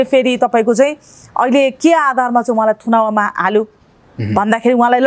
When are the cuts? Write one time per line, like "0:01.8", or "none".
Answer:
none